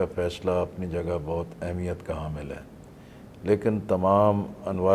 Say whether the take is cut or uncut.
uncut